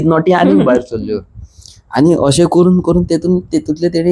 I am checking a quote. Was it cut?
no; 0 cuts

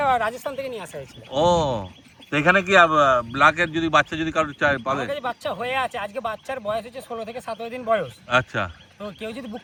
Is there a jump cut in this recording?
no; 0 cuts

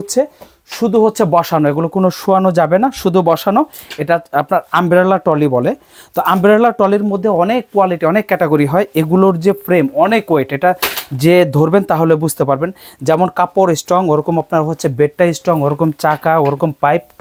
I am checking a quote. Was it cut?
no; 0 cuts

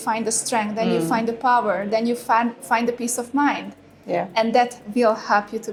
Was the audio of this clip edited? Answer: no; 0 cuts

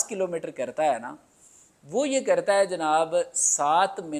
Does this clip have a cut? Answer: no; 0 cuts

